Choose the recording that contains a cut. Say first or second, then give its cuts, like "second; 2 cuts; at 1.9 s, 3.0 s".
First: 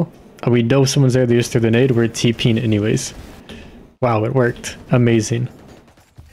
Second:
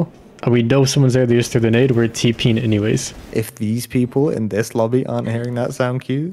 second; 1 cut; at 3.3 s